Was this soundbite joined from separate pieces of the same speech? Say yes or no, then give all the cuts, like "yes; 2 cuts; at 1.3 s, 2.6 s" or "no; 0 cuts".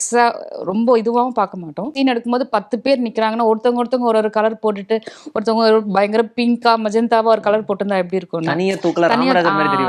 yes; 1 cut; at 1.9 s